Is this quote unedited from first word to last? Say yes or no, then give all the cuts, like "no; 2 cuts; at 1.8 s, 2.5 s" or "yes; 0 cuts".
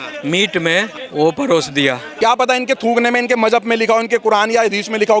no; 2 cuts; at 1.0 s, 2.1 s